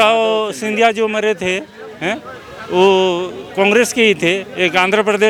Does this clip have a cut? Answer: no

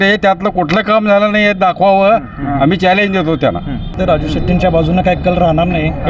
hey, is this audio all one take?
no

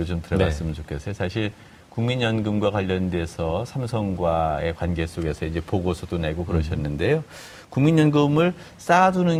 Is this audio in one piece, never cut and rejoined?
yes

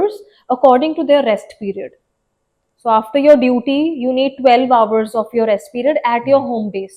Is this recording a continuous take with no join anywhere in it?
yes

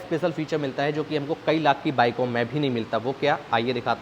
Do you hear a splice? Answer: no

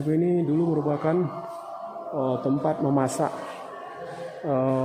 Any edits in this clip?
no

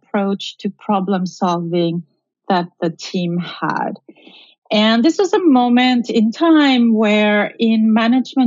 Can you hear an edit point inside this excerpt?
no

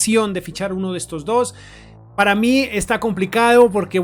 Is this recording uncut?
yes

